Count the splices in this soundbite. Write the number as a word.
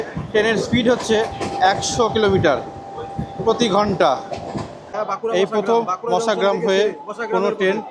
one